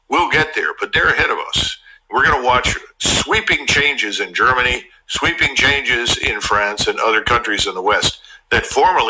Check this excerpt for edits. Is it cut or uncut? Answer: cut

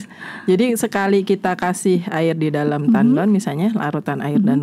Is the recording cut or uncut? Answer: uncut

